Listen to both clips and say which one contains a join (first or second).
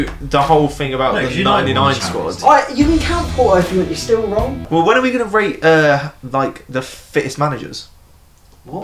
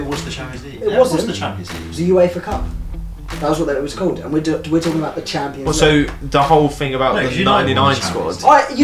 first